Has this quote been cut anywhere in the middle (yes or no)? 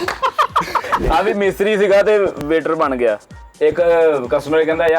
yes